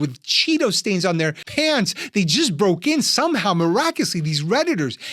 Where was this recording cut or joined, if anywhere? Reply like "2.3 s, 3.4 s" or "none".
1.4 s

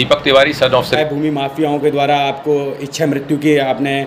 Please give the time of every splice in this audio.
1.0 s

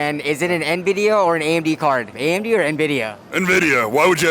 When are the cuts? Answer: 2.1 s

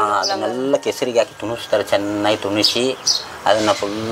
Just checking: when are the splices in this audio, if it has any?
none

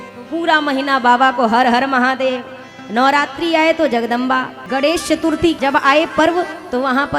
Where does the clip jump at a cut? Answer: 4.6 s, 5.6 s

